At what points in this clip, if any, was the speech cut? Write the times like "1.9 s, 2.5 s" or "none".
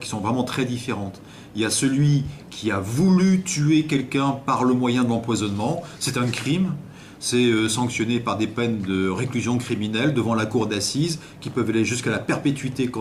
8.9 s